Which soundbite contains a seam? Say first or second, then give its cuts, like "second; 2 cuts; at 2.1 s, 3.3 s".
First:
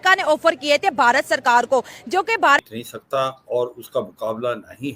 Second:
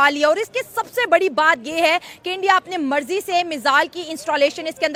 first; 1 cut; at 2.6 s